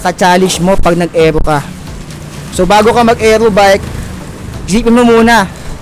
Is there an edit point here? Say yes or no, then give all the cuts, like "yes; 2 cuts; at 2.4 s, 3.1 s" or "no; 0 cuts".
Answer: no; 0 cuts